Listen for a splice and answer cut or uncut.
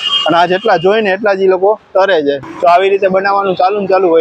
cut